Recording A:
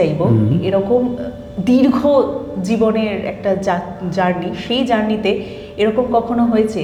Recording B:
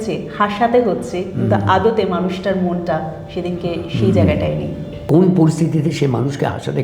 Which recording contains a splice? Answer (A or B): B